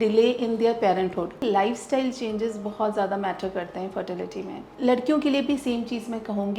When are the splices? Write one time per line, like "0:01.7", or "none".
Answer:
0:01.4
0:04.6